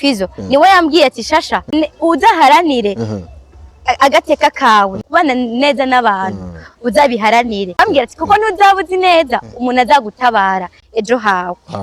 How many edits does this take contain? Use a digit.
3